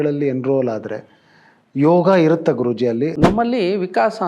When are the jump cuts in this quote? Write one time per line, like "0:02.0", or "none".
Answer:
0:03.1